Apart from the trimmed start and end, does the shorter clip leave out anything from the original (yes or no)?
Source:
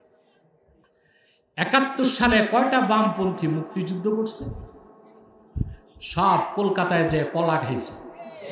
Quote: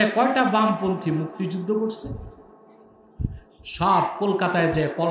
no